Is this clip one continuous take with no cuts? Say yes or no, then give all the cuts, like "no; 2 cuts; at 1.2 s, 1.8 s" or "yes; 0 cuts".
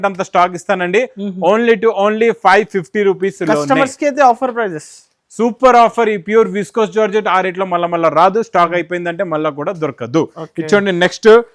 yes; 0 cuts